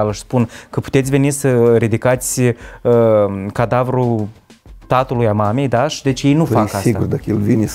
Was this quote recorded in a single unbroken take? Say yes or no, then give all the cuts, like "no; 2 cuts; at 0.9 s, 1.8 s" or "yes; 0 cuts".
yes; 0 cuts